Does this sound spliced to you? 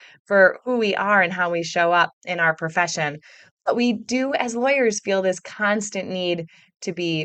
no; 0 cuts

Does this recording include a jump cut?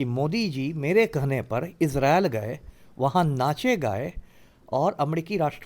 no; 0 cuts

